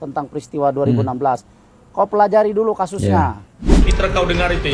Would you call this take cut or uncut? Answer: cut